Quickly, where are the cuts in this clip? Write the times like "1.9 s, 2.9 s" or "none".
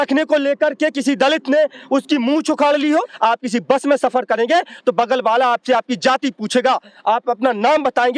3.1 s